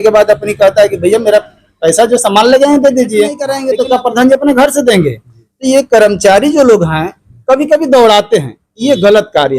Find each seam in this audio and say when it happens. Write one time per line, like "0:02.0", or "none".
0:03.6